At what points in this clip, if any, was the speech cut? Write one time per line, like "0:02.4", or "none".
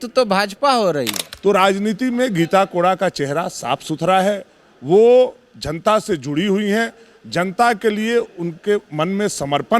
0:01.2